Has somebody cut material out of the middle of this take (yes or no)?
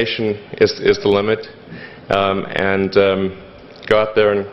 no